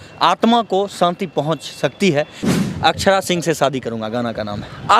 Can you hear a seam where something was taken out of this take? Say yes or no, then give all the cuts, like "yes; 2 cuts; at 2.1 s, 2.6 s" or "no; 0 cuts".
yes; 1 cut; at 2.4 s